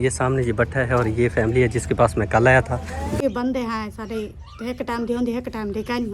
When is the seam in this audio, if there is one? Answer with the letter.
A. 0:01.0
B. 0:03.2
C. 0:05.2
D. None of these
B